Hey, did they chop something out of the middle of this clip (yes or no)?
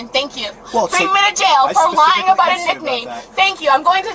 no